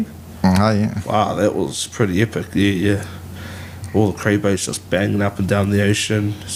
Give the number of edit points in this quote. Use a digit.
0